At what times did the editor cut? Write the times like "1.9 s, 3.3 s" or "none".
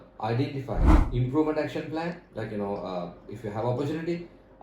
1.0 s